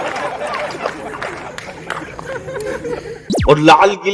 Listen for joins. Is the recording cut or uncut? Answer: cut